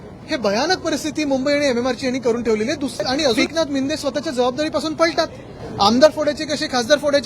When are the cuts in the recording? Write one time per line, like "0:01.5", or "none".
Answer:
0:03.4